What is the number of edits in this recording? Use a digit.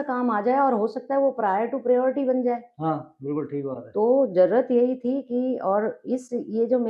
0